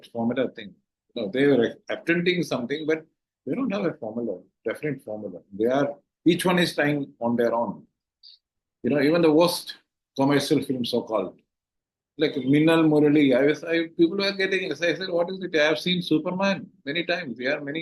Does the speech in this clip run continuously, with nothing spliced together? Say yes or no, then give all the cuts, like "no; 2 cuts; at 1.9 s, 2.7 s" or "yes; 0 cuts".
yes; 0 cuts